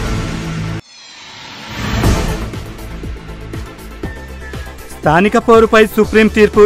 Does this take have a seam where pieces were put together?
yes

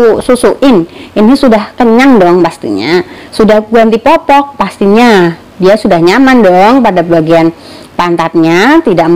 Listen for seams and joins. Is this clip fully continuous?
yes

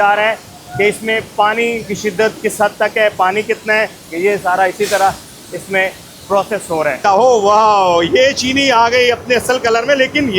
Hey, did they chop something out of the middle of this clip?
yes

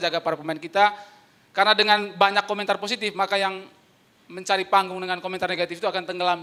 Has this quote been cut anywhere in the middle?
no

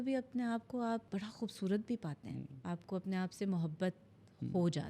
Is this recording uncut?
no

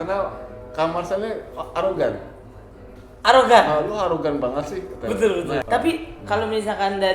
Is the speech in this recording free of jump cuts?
no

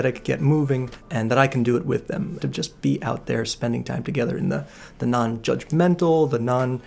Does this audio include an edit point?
yes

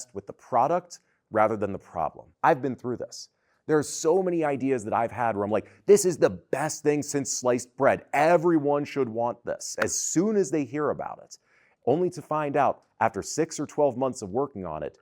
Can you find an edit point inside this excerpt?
yes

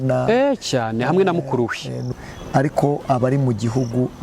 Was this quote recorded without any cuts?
no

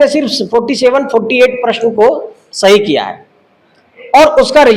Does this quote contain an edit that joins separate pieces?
no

